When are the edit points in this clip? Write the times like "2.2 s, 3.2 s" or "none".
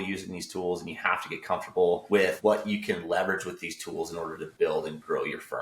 2.2 s